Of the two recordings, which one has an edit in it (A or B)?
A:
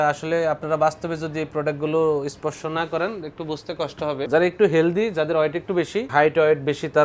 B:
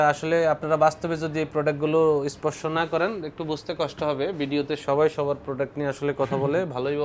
A